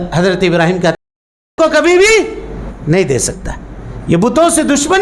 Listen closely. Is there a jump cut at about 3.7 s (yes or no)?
no